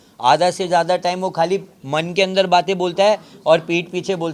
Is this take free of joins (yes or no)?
yes